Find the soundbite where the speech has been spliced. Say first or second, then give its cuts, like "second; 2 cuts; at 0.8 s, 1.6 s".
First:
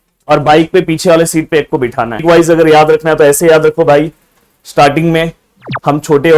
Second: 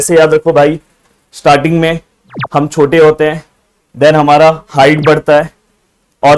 first; 1 cut; at 2.2 s